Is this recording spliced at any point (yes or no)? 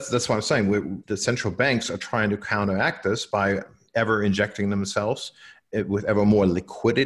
yes